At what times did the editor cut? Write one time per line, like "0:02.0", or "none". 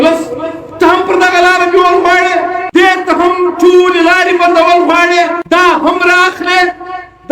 0:02.6
0:05.4